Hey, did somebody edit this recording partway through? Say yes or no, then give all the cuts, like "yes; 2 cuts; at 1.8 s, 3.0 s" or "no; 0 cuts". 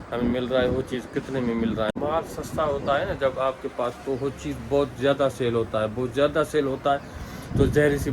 yes; 1 cut; at 1.9 s